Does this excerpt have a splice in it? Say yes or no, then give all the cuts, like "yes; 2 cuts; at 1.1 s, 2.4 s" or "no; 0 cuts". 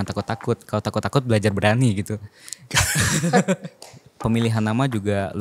yes; 1 cut; at 4.1 s